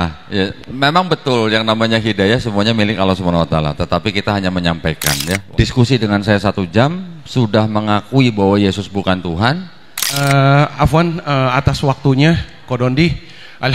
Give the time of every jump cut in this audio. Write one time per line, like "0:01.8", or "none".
0:05.4
0:10.2